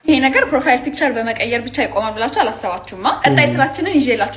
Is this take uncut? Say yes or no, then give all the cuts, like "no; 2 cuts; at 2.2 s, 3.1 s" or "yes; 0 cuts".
yes; 0 cuts